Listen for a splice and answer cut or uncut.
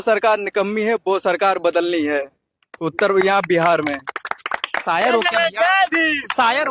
uncut